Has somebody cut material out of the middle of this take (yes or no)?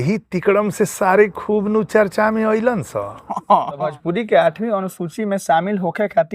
yes